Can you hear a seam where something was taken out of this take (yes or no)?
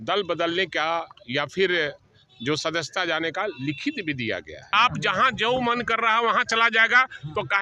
yes